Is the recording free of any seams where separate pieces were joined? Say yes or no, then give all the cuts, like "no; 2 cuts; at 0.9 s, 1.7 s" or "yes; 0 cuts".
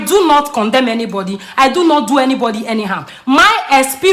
yes; 0 cuts